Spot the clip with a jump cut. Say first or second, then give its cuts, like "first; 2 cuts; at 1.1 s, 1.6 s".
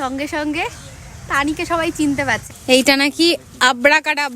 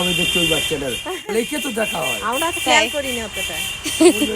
first; 1 cut; at 2.4 s